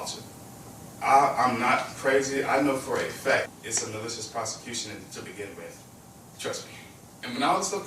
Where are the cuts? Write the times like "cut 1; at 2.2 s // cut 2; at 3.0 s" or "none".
cut 1; at 3.5 s